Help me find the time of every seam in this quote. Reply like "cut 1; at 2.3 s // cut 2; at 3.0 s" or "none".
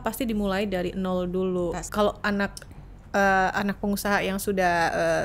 cut 1; at 1.8 s